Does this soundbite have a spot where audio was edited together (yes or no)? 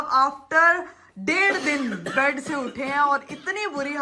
no